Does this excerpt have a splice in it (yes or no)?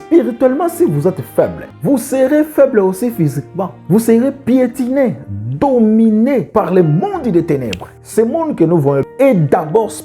yes